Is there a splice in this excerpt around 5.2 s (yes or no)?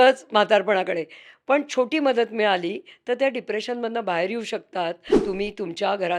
yes